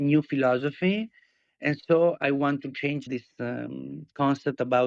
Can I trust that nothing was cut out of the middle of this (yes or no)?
yes